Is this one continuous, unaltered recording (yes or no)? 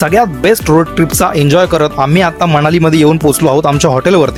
yes